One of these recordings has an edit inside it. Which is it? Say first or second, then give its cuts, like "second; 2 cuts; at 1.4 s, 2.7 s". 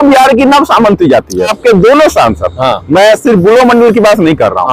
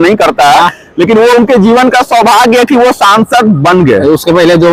first; 1 cut; at 1.5 s